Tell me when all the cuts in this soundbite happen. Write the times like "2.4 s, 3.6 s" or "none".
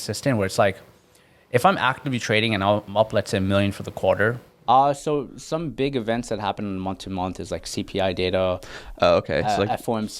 4.5 s